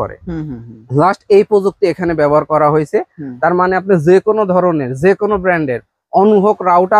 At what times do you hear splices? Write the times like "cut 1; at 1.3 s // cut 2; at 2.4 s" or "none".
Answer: none